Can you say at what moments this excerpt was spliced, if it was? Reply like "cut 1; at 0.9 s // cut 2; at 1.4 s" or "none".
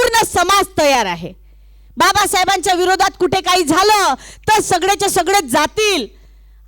none